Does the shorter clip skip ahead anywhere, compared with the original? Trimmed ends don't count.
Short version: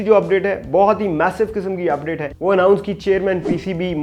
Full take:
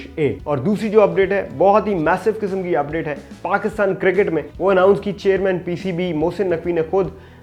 yes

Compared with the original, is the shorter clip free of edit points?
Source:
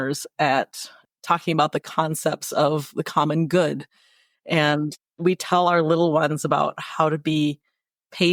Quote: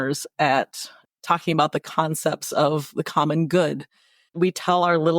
no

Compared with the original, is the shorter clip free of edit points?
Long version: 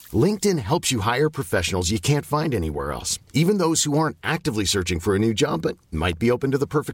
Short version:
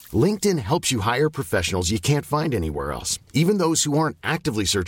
yes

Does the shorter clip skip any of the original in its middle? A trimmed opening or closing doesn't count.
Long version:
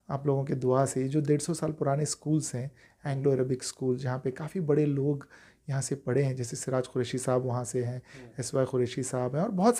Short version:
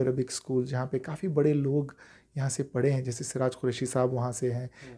no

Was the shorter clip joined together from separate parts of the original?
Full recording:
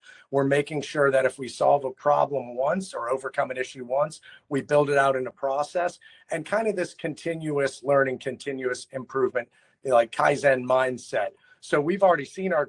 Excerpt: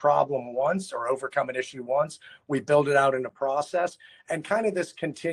no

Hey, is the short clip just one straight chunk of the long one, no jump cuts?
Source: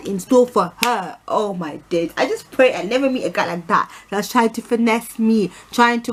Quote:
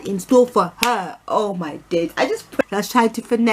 no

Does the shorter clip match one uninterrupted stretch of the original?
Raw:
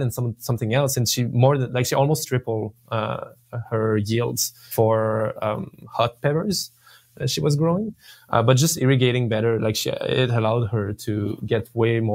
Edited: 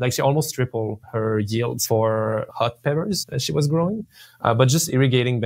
no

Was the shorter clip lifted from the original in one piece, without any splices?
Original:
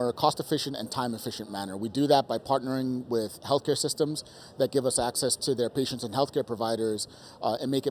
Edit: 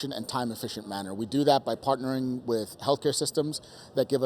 yes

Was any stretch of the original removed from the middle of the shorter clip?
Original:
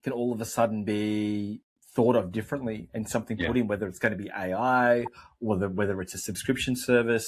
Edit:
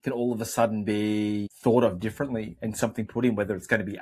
yes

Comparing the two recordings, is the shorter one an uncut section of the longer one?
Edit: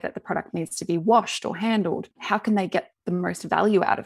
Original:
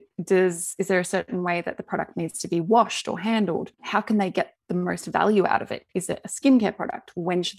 yes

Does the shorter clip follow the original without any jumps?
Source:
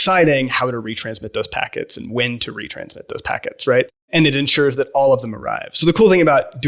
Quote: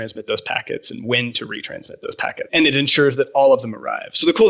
no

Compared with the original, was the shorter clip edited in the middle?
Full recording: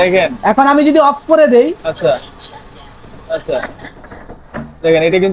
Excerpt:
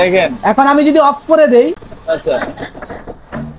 yes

